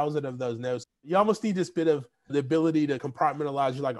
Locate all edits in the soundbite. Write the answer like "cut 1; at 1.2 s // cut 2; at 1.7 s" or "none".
cut 1; at 1.0 s // cut 2; at 2.3 s // cut 3; at 3.0 s